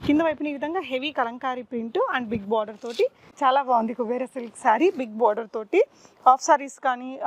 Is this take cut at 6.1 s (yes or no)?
no